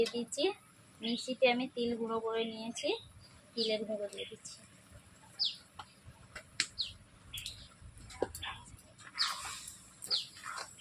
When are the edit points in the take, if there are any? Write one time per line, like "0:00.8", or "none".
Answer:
none